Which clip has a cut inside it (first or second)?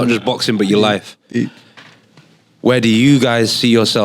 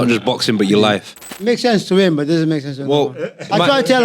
second